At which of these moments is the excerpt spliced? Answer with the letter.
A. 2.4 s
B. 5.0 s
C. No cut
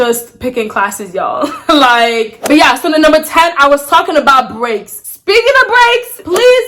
C